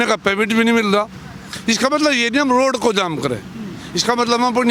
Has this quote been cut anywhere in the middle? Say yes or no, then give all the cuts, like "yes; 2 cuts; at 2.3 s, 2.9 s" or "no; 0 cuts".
no; 0 cuts